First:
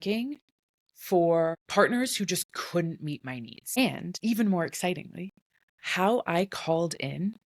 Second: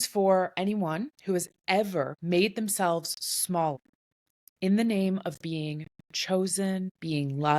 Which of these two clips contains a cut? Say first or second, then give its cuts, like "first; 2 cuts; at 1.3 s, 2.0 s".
second; 3 cuts; at 1.1 s, 2.2 s, 3.8 s